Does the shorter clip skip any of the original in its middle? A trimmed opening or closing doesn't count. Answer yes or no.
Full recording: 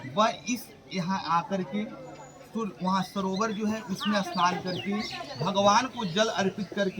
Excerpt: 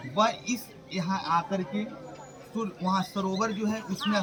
no